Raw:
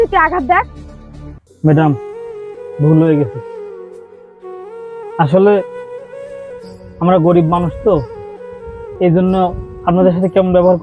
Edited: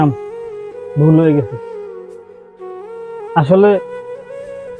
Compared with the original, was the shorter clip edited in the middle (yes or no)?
no